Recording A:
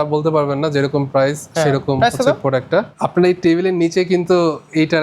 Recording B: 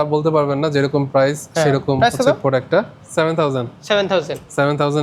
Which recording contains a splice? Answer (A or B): A